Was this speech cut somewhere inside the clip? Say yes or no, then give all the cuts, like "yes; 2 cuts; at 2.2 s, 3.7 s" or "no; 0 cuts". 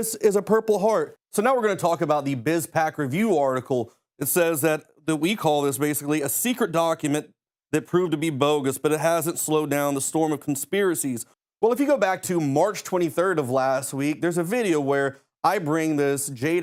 no; 0 cuts